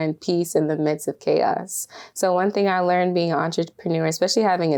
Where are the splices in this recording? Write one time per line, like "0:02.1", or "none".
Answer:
none